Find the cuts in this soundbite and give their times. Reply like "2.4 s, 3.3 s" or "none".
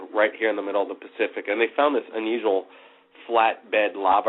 1.4 s